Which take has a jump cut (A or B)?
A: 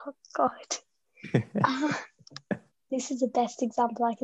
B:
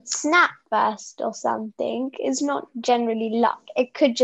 A